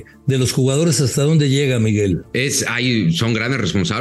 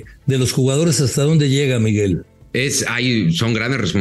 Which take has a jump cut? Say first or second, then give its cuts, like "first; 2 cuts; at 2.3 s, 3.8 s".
first; 1 cut; at 2.3 s